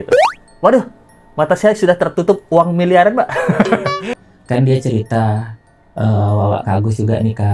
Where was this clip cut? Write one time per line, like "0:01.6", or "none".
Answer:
0:04.2